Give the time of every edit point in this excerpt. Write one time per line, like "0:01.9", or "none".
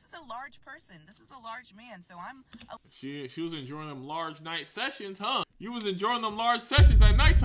0:02.9
0:05.5